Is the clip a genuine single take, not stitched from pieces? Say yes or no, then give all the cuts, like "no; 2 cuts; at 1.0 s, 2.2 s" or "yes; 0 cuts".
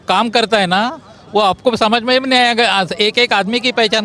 yes; 0 cuts